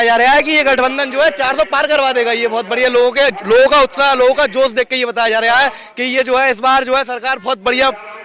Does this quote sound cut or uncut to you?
uncut